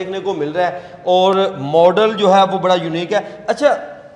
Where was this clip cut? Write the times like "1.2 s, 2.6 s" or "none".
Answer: none